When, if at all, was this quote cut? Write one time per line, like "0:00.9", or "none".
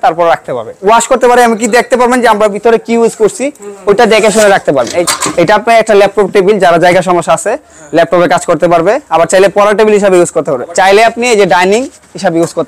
0:00.8
0:05.0
0:10.7

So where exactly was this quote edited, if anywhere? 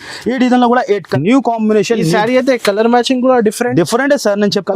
0:01.1

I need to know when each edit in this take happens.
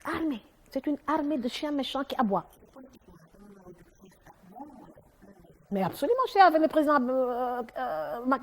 0:02.6

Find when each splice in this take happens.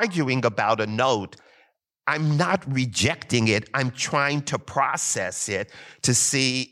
none

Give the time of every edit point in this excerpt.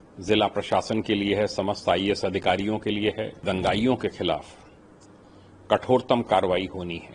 0:03.4

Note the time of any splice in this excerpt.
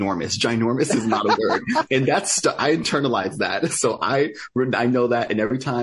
none

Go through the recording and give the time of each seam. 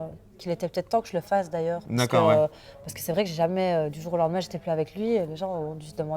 none

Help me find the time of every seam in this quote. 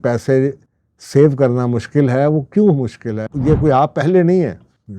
0:03.3

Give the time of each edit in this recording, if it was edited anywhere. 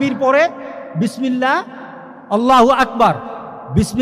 none

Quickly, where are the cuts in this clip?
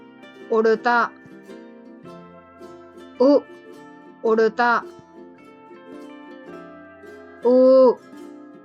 0:01.1
0:02.7
0:04.8
0:06.8

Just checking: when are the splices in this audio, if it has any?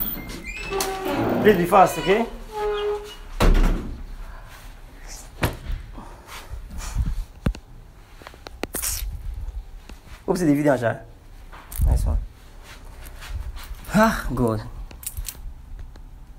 none

